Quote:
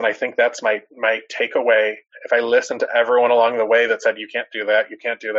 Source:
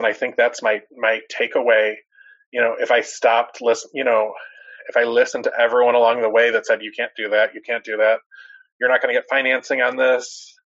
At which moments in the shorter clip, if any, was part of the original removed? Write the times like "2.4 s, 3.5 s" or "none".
2.1 s